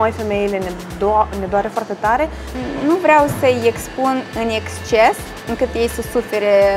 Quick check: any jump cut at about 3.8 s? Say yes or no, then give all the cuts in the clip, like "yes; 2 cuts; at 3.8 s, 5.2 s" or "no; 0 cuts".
no; 1 cut; at 2.6 s